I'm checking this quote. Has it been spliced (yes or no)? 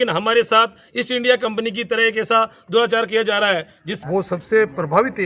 yes